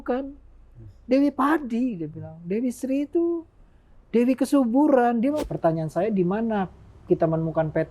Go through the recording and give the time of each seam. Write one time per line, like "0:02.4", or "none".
0:05.4